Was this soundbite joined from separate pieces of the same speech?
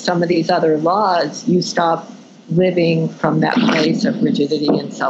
no; 0 cuts

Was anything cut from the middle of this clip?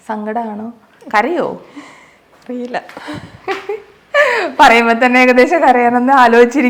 no; 0 cuts

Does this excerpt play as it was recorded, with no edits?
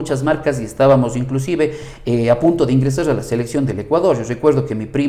yes; 0 cuts

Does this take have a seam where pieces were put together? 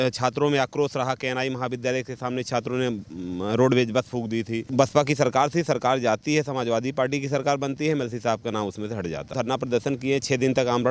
yes; 2 cuts; at 4.6 s, 9.3 s

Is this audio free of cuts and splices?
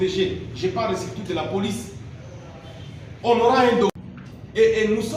no; 1 cut; at 3.9 s

